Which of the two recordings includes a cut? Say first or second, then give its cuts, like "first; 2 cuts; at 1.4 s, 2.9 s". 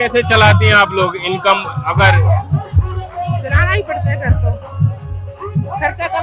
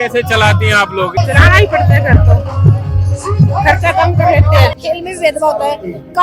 second; 2 cuts; at 1.2 s, 4.7 s